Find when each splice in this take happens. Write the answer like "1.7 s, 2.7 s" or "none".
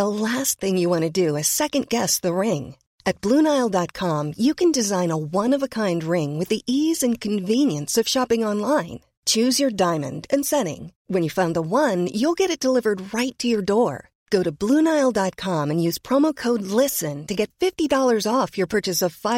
none